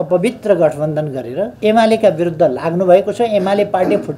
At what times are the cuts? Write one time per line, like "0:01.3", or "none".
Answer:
0:01.5